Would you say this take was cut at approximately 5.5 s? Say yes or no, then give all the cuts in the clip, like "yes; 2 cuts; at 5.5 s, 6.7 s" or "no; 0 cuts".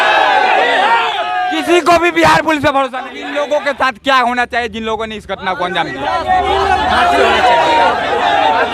no; 1 cut; at 3.2 s